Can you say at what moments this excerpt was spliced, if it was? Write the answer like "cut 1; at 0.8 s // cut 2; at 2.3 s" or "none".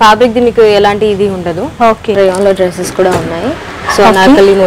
cut 1; at 2.1 s